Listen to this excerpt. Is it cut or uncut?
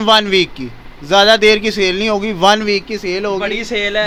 uncut